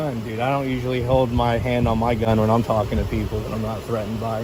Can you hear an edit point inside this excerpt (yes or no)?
no